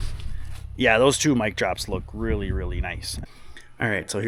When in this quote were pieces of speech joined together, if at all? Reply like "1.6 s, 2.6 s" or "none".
3.1 s